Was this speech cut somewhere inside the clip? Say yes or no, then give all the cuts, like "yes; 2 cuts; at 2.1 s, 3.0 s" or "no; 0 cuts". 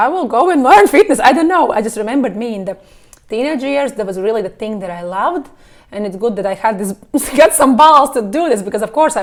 no; 0 cuts